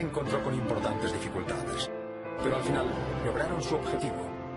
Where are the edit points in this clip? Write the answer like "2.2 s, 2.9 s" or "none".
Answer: none